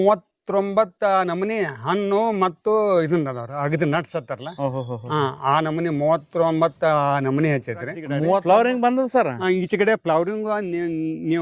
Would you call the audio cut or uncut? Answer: cut